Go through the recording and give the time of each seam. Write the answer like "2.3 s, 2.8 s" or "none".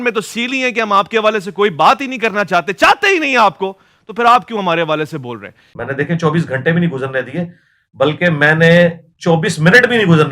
5.7 s